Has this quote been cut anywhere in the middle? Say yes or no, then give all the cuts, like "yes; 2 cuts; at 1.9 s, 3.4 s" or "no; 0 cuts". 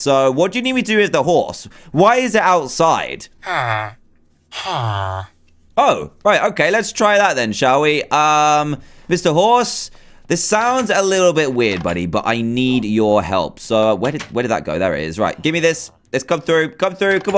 no; 0 cuts